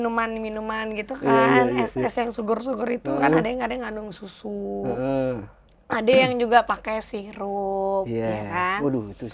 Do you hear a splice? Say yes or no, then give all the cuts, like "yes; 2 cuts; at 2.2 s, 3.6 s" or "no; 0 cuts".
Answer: no; 0 cuts